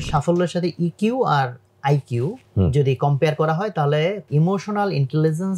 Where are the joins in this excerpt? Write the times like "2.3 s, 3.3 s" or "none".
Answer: 2.4 s, 4.2 s